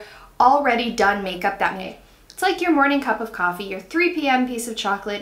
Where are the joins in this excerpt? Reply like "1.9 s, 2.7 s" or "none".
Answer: 1.9 s